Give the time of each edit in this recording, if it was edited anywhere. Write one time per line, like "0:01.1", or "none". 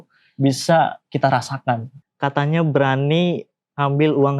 0:01.9

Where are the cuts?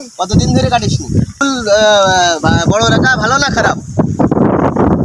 0:01.4

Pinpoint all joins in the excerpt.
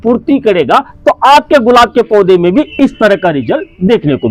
none

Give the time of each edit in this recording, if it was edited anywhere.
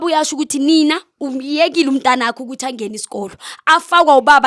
none

